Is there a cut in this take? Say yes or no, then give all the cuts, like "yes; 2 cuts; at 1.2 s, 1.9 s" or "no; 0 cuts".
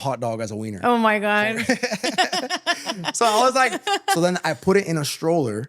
no; 0 cuts